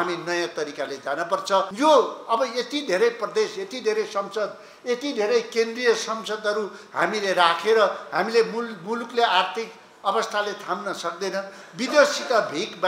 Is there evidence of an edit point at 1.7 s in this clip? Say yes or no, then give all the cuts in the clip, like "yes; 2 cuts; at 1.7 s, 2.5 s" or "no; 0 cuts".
yes; 1 cut; at 1.7 s